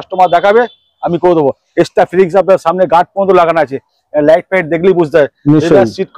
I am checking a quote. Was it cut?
no; 0 cuts

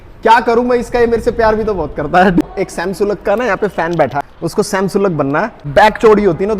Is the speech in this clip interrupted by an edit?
yes; 3 cuts; at 2.4 s, 4.3 s, 5.6 s

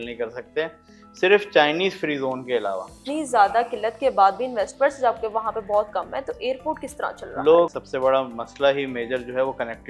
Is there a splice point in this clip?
yes; 2 cuts; at 2.9 s, 7.8 s

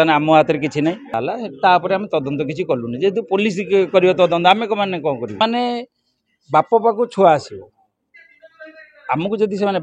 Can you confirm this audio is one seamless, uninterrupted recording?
no; 2 cuts; at 1.1 s, 5.4 s

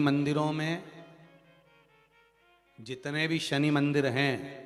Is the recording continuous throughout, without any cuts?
yes; 0 cuts

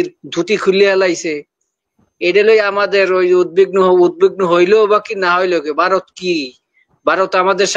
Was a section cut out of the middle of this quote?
no; 0 cuts

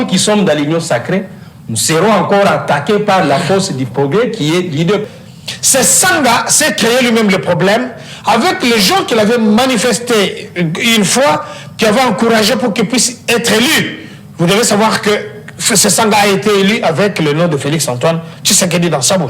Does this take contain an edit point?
yes; 1 cut; at 5.0 s

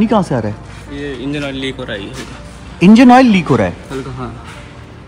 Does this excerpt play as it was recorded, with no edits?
yes; 0 cuts

